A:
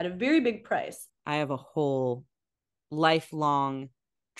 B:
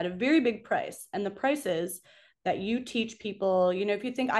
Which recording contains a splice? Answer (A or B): A